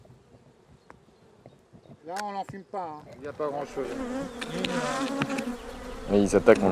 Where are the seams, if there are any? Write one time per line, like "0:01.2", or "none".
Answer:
0:03.3